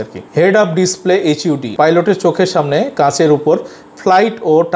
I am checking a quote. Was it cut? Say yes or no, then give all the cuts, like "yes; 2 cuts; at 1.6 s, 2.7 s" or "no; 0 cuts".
yes; 1 cut; at 1.7 s